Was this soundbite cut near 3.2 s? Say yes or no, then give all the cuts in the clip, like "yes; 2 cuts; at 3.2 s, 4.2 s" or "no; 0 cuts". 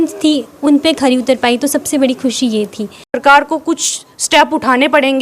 yes; 1 cut; at 3.2 s